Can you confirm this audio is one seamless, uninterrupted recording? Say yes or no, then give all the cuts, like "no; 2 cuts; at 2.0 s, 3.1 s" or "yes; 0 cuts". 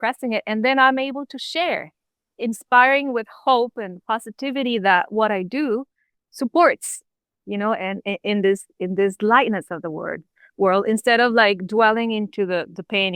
yes; 0 cuts